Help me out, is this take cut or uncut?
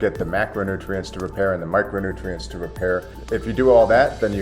cut